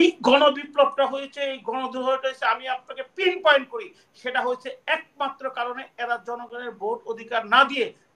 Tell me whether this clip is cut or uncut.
uncut